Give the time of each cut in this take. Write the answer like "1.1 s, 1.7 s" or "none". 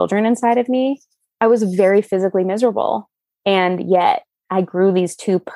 none